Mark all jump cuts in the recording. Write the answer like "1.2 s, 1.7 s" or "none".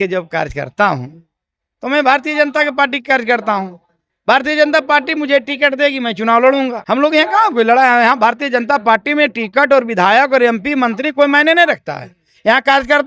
6.8 s

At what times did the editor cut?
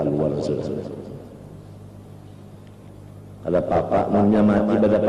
none

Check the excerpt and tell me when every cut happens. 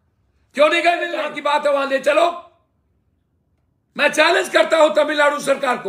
1.3 s

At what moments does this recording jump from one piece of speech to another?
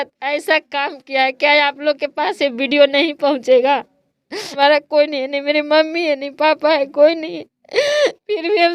4.5 s

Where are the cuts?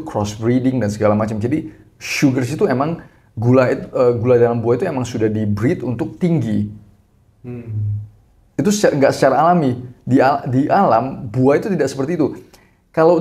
none

